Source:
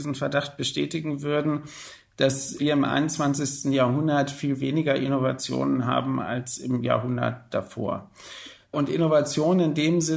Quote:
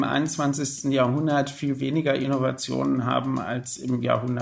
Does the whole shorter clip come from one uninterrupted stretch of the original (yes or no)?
yes